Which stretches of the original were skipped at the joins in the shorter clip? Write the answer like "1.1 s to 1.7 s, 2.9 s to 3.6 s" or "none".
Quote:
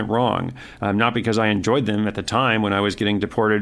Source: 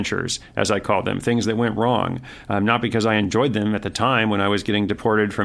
none